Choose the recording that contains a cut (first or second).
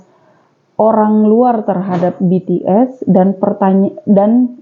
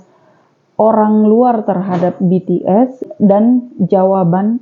second